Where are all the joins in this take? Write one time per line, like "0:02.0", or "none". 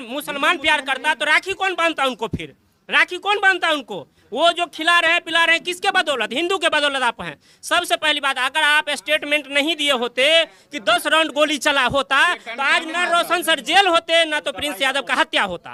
none